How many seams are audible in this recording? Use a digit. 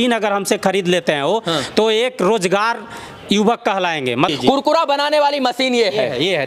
1